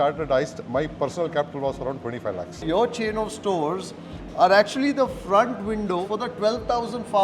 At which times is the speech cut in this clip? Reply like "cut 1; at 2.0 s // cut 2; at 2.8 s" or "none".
cut 1; at 2.6 s // cut 2; at 6.1 s

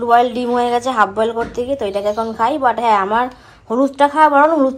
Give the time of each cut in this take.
none

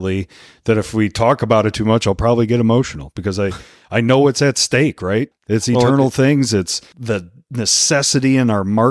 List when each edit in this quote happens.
cut 1; at 5.4 s // cut 2; at 6.8 s

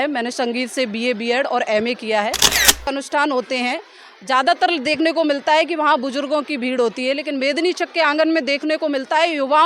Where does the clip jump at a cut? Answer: cut 1; at 2.8 s

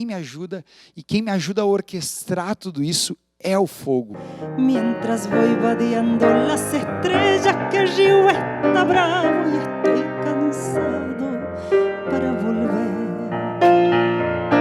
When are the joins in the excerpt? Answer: cut 1; at 4.2 s

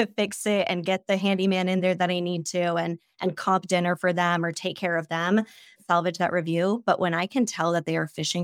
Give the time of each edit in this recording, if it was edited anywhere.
cut 1; at 5.8 s

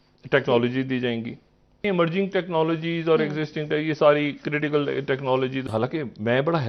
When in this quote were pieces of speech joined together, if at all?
cut 1; at 1.8 s // cut 2; at 5.6 s

